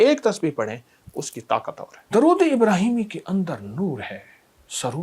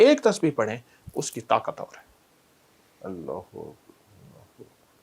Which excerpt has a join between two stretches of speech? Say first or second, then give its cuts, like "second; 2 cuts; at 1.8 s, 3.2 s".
first; 1 cut; at 2.0 s